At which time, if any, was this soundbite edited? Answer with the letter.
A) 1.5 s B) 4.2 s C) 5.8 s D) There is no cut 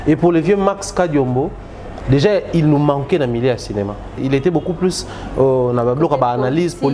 B